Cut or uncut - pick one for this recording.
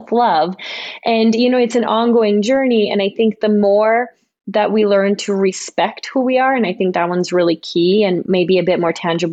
cut